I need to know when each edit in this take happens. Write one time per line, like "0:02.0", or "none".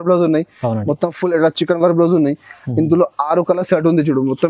none